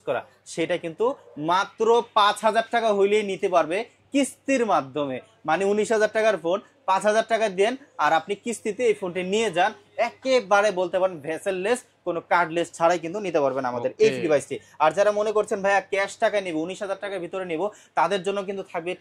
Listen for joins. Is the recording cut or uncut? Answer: uncut